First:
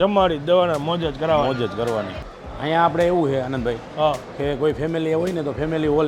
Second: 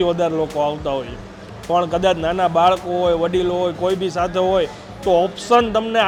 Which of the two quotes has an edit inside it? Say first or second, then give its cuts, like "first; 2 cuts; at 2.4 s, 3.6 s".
first; 1 cut; at 2.2 s